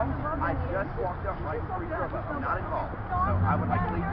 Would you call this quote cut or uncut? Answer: uncut